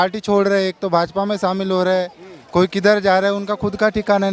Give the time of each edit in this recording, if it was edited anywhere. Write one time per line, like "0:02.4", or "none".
none

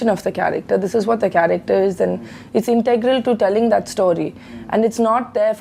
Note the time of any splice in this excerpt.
none

